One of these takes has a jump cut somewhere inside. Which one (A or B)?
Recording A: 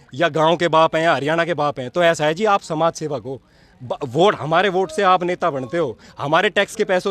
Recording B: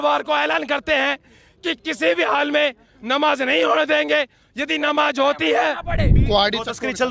B